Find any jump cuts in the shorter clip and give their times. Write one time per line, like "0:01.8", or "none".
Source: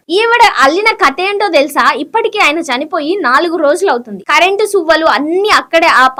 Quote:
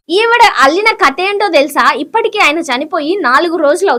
none